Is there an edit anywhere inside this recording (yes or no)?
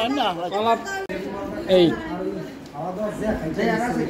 yes